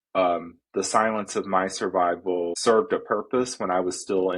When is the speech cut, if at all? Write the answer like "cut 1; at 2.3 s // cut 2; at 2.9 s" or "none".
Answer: cut 1; at 2.6 s

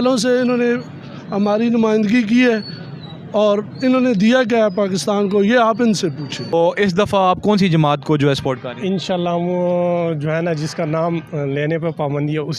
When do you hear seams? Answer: cut 1; at 6.4 s

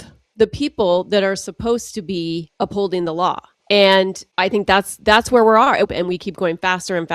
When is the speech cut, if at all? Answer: cut 1; at 2.5 s // cut 2; at 3.5 s // cut 3; at 4.2 s // cut 4; at 5.9 s

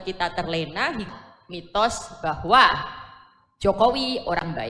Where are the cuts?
cut 1; at 1.1 s

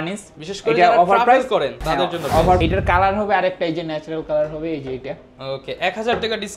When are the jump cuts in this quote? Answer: cut 1; at 2.6 s

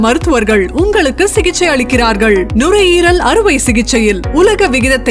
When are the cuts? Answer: none

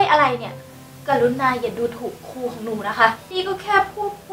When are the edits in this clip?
cut 1; at 3.2 s

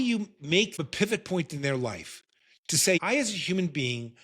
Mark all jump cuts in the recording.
cut 1; at 0.8 s // cut 2; at 3.0 s

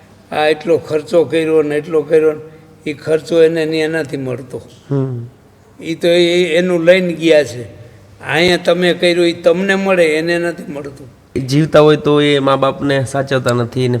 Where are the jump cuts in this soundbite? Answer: cut 1; at 11.4 s

